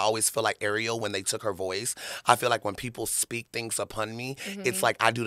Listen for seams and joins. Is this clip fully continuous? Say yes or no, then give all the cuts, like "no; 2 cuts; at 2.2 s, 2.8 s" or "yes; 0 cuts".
yes; 0 cuts